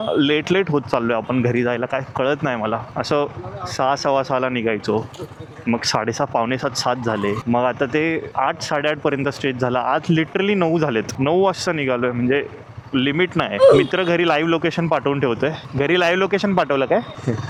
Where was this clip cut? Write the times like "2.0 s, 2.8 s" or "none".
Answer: none